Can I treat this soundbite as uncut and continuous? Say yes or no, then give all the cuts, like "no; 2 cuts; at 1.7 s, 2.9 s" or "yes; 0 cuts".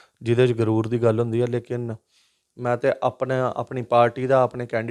yes; 0 cuts